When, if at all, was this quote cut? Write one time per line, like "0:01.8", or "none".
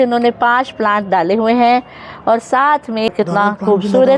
0:03.1